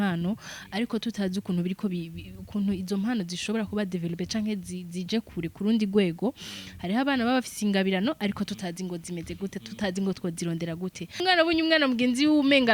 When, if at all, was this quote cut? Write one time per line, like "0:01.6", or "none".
0:11.2

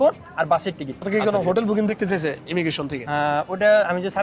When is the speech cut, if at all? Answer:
0:01.1

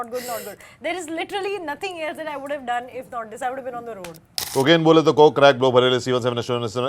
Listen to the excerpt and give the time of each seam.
0:04.3

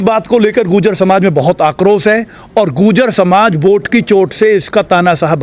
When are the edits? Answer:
none

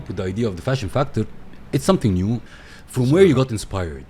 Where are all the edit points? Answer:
0:02.5

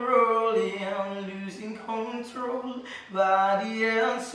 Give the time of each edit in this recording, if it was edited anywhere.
none

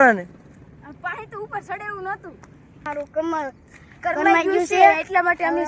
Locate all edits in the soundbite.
0:02.8

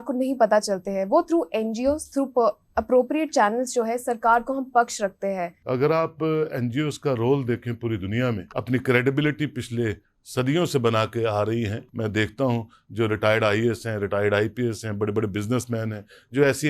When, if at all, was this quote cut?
0:05.5
0:08.5
0:11.8

